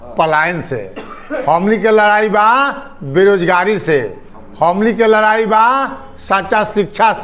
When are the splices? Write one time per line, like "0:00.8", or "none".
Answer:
none